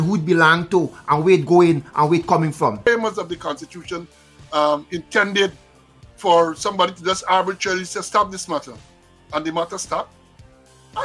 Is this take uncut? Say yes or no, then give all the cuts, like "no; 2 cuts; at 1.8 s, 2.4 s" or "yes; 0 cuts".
no; 1 cut; at 2.9 s